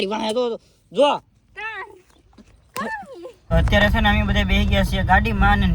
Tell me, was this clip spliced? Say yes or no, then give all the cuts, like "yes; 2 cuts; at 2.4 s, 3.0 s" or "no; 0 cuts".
yes; 1 cut; at 3.4 s